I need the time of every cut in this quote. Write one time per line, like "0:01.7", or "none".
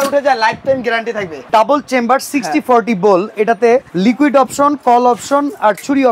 0:01.5
0:03.9